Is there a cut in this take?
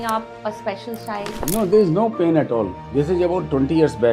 yes; 1 cut; at 2.8 s

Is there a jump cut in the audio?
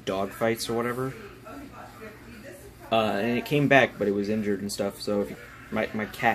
yes; 1 cut; at 5.3 s

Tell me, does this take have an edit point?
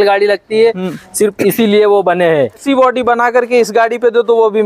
yes; 1 cut; at 2.6 s

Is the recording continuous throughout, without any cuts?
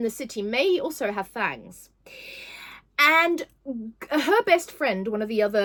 yes; 0 cuts

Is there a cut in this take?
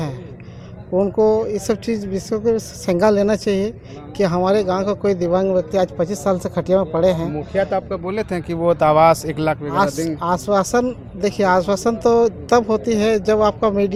no; 0 cuts

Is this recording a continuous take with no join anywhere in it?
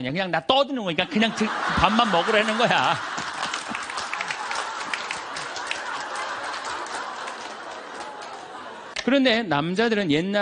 no; 1 cut; at 8.8 s

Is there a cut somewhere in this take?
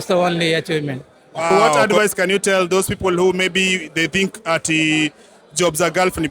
yes; 1 cut; at 1.7 s

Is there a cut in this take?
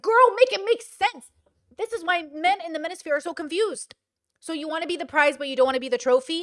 no; 0 cuts

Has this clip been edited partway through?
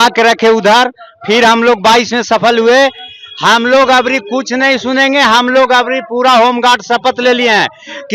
no; 0 cuts

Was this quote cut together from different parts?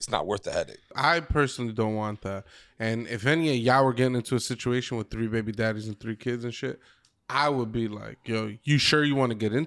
yes; 1 cut; at 0.9 s

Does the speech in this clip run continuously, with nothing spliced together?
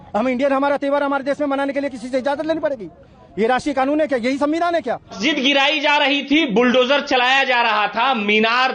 no; 1 cut; at 5.2 s

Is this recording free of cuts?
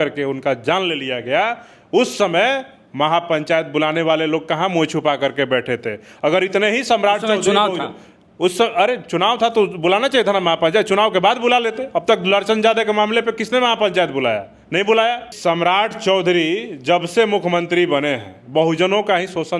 yes; 0 cuts

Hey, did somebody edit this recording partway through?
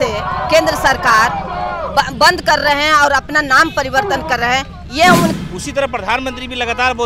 yes; 1 cut; at 5.3 s

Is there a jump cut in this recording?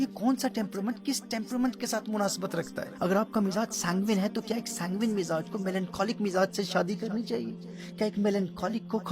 yes; 1 cut; at 2.8 s

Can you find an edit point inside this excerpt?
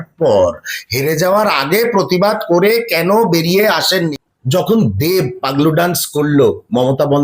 yes; 1 cut; at 3.9 s

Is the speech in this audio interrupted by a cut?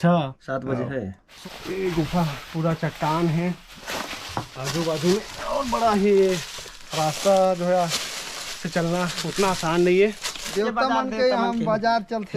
yes; 2 cuts; at 1.2 s, 10.5 s

